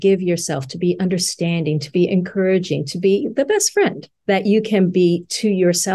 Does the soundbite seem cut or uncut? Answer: uncut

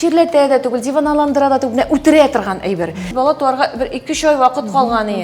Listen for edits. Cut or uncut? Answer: cut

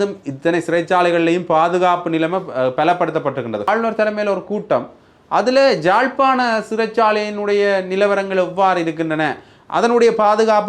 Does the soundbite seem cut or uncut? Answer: cut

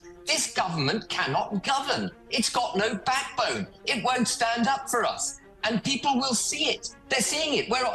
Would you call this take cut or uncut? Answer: uncut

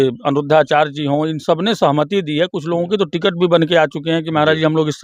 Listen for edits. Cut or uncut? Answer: uncut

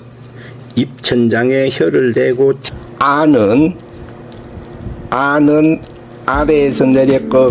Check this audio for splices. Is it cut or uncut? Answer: cut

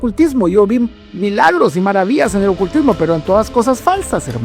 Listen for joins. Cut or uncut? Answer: uncut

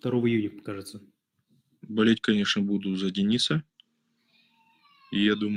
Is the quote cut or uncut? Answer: uncut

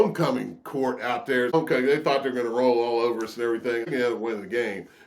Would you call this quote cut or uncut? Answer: cut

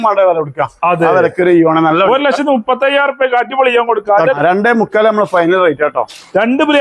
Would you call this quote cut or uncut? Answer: cut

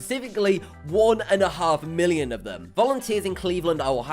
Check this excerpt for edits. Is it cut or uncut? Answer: cut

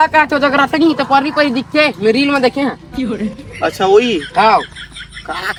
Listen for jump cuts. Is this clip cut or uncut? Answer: uncut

